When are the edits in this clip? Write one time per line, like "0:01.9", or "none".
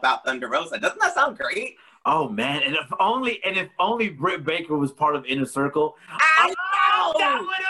none